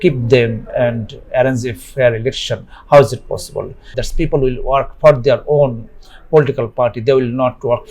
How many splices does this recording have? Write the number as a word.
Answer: one